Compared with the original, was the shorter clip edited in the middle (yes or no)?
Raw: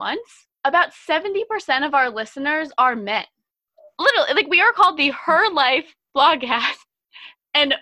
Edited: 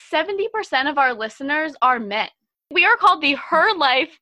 yes